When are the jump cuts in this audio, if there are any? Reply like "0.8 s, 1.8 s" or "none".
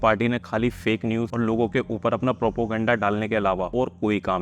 1.3 s, 3.7 s